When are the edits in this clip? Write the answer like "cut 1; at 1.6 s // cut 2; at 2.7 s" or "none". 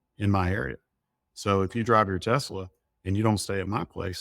none